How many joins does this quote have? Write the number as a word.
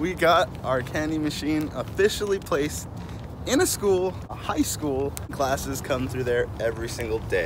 two